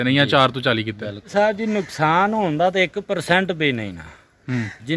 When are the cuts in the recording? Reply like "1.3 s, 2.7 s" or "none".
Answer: 1.2 s